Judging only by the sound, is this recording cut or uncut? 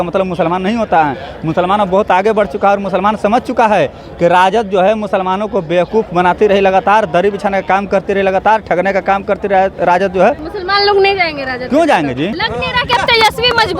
cut